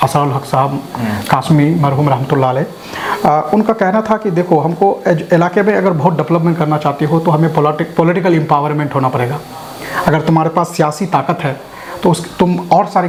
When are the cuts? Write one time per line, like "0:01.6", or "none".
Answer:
none